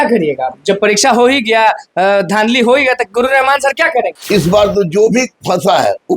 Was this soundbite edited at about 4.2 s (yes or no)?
yes